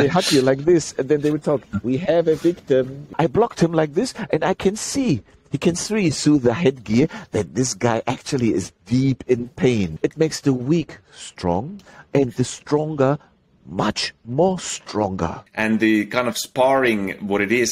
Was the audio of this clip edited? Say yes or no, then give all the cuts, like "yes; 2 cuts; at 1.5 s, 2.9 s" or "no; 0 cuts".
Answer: yes; 3 cuts; at 3.0 s, 9.9 s, 15.4 s